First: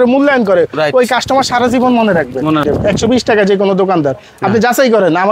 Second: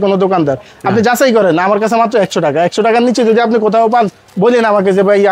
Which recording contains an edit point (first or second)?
first